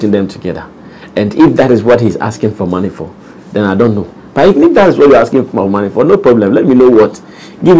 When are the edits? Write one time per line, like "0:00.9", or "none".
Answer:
none